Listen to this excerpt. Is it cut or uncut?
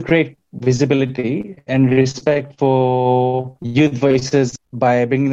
cut